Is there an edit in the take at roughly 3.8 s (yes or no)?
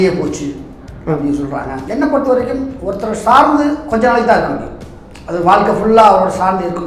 no